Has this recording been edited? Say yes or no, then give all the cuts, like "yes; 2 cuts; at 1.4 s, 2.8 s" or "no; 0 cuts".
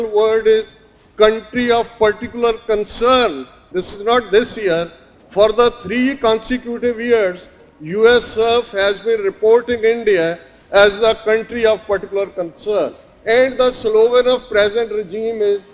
yes; 2 cuts; at 3.7 s, 13.1 s